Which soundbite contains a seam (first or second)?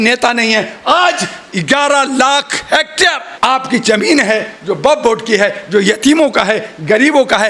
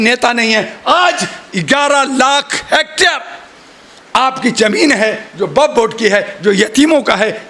first